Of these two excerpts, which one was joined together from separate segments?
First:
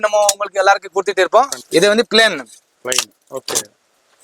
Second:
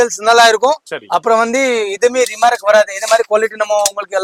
first; 1 cut; at 1.6 s

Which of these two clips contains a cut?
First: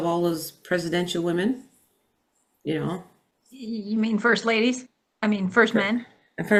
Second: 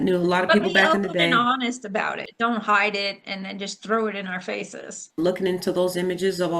second; 2 cuts; at 2.2 s, 5.2 s

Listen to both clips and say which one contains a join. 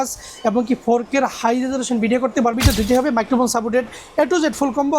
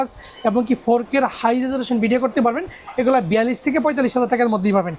first; 1 cut; at 2.6 s

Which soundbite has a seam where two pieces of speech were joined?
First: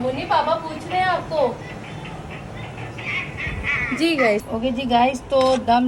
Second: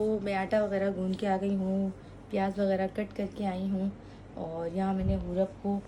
first; 1 cut; at 4.5 s

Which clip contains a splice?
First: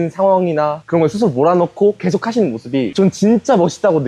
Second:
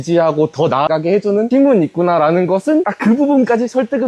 second; 2 cuts; at 1.3 s, 2.9 s

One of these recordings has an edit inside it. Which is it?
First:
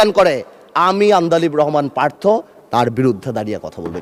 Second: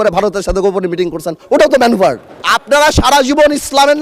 second; 1 cut; at 2.5 s

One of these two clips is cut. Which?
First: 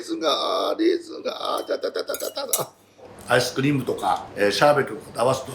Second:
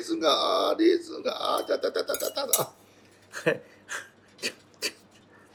first; 2 cuts; at 3.1 s, 4.3 s

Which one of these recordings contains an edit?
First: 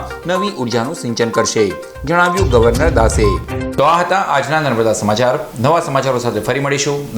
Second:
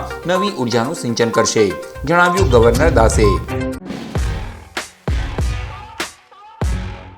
second; 1 cut; at 3.8 s

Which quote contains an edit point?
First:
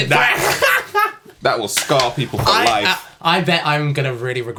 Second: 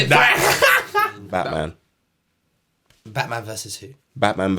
second; 1 cut; at 1.2 s

